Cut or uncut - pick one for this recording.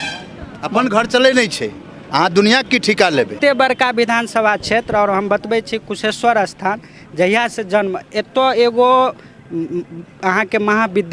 cut